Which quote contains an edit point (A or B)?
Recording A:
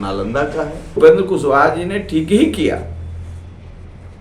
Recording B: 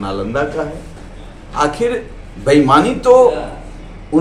A